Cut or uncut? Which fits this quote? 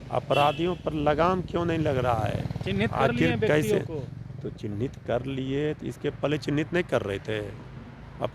uncut